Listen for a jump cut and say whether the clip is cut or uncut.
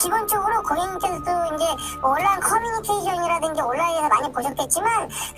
uncut